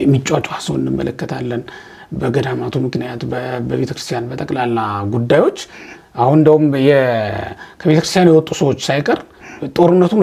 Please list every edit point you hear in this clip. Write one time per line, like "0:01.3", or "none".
none